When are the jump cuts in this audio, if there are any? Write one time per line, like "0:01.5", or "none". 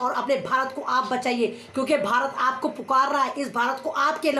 none

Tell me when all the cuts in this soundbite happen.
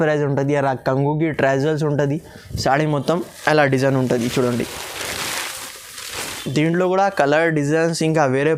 none

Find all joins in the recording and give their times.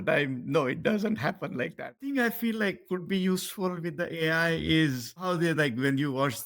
0:02.0
0:05.2

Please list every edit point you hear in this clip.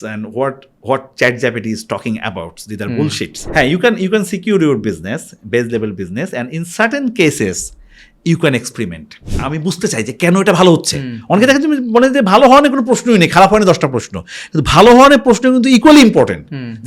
0:03.4
0:09.2

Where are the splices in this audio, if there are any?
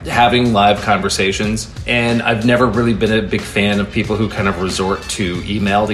0:01.7

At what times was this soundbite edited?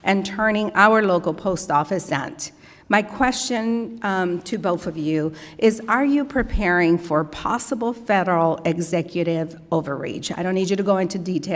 0:02.0

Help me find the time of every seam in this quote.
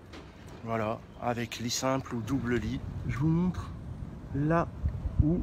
0:03.0

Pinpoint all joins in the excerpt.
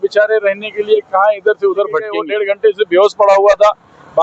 0:02.2

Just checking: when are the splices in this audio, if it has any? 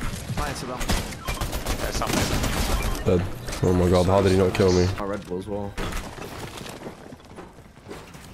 0:05.1

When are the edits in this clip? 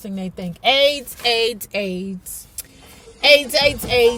none

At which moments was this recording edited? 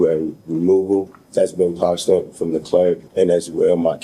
0:01.2
0:03.1

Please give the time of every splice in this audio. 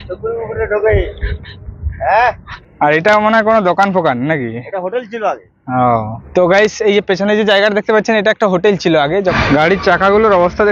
0:02.5
0:06.2
0:09.4

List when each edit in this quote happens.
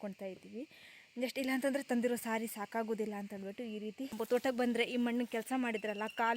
0:04.1

